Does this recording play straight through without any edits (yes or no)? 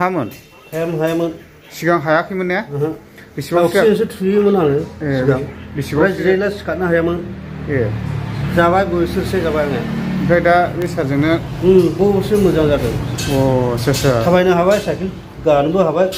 yes